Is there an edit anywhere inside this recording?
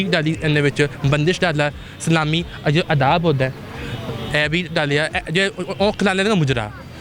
no; 0 cuts

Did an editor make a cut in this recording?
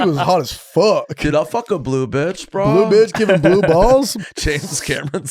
yes; 1 cut; at 4.1 s

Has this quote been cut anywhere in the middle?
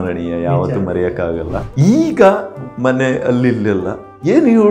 yes; 1 cut; at 1.6 s

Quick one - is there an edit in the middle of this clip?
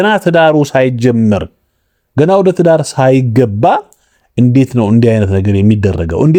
no; 0 cuts

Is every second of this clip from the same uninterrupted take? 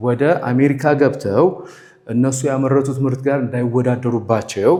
yes; 0 cuts

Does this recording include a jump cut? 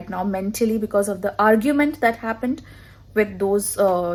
no; 0 cuts

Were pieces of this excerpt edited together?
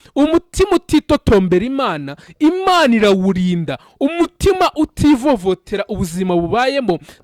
no; 0 cuts

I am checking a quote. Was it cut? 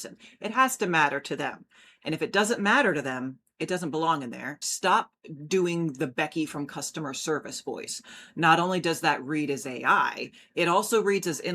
yes; 1 cut; at 4.6 s

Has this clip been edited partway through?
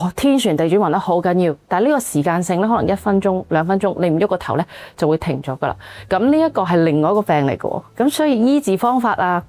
no; 0 cuts

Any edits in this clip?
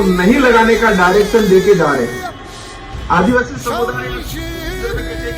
no; 0 cuts

